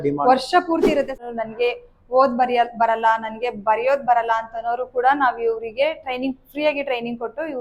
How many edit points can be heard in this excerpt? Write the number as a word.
one